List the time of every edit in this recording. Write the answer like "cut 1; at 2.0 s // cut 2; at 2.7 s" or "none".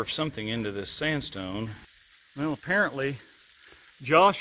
cut 1; at 1.8 s